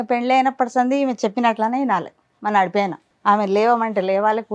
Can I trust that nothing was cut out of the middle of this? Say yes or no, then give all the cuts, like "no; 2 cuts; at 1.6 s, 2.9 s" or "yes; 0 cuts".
no; 1 cut; at 3.1 s